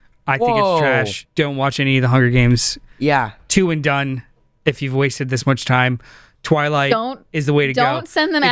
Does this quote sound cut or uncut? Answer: cut